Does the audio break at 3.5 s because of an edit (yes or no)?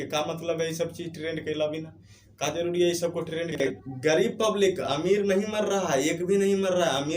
yes